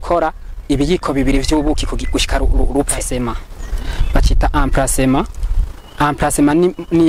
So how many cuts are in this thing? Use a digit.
1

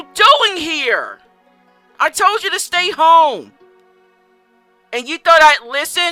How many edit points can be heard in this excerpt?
0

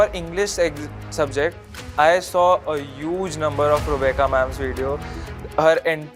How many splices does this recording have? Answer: 0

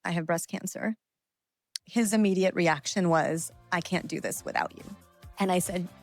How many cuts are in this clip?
0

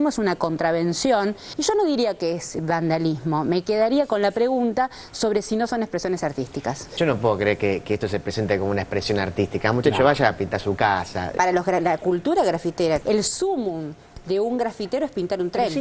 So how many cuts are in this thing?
2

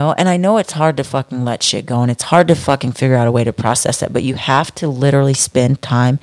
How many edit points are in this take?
0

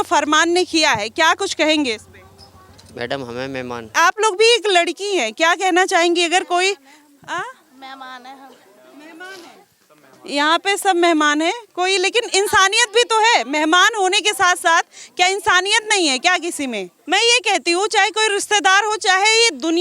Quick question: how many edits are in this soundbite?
2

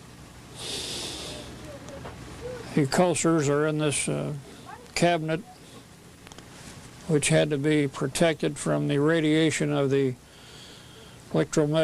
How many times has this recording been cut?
1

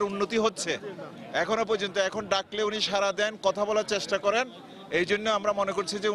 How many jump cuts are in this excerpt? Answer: 0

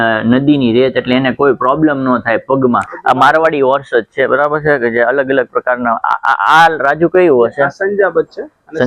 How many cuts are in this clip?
1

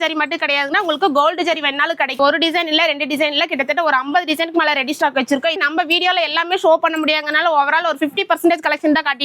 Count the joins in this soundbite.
2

